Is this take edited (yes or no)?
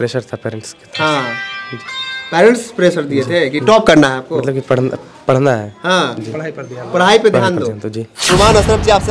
yes